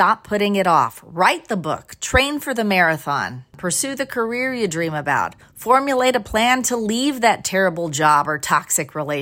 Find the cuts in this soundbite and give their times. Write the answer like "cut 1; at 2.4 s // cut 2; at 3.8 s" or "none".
none